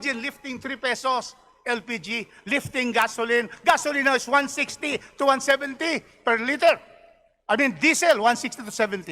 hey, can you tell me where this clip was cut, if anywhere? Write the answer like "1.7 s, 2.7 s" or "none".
none